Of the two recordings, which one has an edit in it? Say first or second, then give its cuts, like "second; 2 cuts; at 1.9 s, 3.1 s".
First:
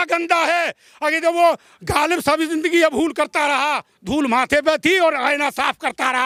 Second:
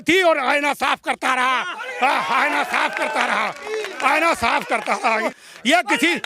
second; 1 cut; at 5.3 s